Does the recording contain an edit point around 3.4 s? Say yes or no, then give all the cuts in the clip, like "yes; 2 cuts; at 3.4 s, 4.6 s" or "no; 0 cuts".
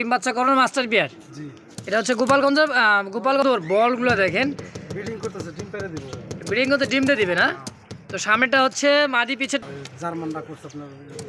yes; 2 cuts; at 3.4 s, 9.6 s